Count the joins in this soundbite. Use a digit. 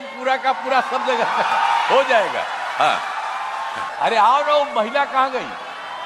1